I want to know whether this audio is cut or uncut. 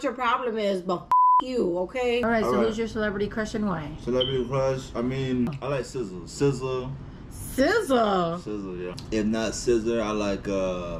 cut